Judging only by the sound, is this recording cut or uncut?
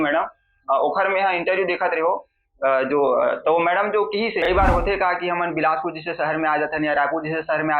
cut